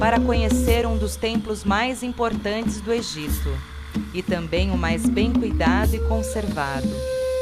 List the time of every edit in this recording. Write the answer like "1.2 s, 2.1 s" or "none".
1.6 s